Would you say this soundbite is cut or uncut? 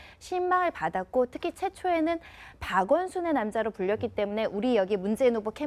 uncut